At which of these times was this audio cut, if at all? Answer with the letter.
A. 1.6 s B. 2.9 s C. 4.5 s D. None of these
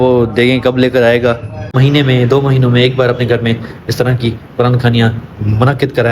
A